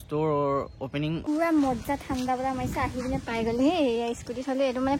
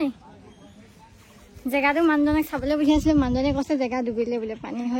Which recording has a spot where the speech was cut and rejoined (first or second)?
first